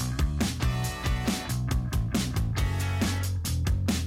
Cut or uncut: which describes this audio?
cut